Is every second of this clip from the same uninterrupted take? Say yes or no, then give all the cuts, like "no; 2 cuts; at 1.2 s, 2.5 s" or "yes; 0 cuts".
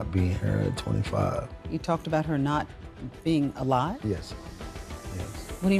yes; 0 cuts